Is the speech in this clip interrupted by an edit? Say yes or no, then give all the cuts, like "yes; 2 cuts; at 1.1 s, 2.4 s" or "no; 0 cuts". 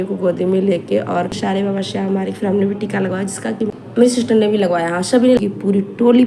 yes; 3 cuts; at 1.4 s, 3.6 s, 5.4 s